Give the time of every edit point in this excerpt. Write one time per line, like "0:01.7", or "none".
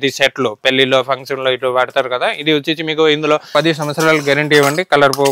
0:03.5

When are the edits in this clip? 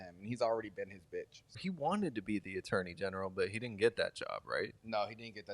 0:01.6

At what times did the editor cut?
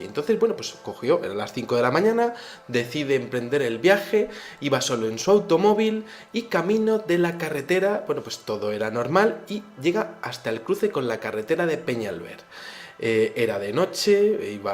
0:07.5

